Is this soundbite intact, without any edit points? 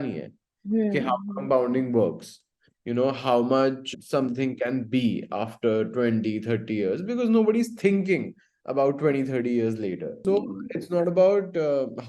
no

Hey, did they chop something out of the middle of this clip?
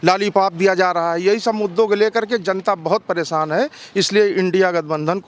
no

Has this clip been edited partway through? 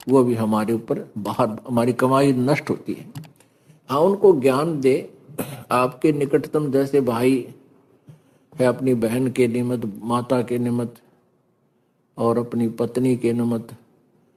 no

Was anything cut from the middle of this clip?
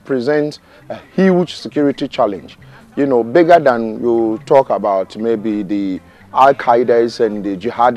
no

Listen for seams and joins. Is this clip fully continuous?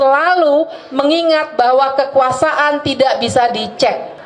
yes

